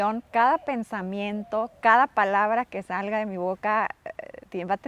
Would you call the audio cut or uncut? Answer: uncut